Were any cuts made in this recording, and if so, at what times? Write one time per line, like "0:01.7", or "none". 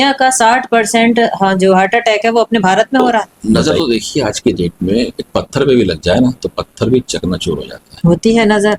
0:03.3